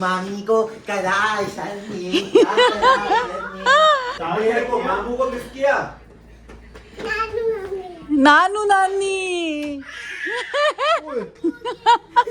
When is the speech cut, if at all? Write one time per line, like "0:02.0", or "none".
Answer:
0:04.1
0:11.3